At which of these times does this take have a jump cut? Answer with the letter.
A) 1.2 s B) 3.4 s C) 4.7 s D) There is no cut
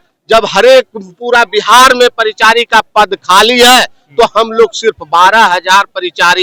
D